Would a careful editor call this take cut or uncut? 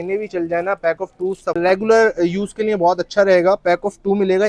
cut